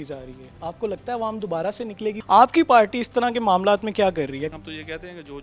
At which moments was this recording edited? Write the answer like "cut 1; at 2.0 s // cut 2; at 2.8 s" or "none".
cut 1; at 2.2 s // cut 2; at 4.5 s